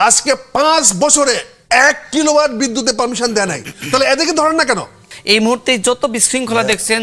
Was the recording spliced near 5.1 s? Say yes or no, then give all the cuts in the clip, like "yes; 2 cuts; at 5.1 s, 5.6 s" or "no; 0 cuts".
yes; 1 cut; at 5.1 s